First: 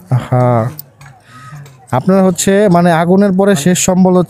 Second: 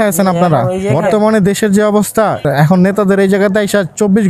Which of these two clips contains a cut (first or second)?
second